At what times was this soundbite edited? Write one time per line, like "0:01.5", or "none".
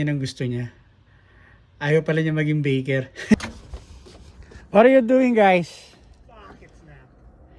0:03.3